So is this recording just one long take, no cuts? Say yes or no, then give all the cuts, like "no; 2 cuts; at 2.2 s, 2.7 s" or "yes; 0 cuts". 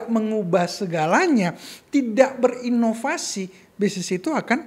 yes; 0 cuts